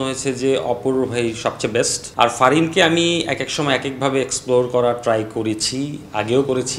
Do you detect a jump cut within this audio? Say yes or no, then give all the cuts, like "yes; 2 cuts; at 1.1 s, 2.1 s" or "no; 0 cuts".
yes; 1 cut; at 2.0 s